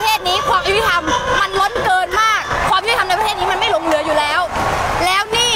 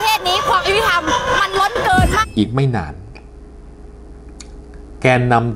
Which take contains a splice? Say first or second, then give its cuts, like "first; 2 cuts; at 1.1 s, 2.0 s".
second; 1 cut; at 2.2 s